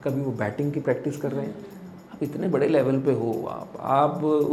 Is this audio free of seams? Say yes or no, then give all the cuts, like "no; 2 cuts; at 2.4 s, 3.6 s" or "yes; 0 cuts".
yes; 0 cuts